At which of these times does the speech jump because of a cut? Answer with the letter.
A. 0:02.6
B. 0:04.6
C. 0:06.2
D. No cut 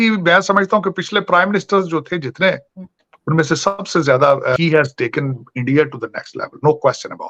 B